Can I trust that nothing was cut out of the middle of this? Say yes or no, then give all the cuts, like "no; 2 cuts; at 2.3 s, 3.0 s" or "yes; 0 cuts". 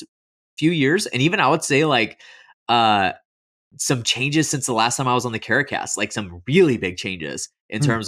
yes; 0 cuts